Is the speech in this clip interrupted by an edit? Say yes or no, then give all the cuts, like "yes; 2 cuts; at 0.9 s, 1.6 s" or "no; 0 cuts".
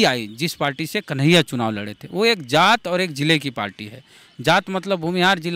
no; 0 cuts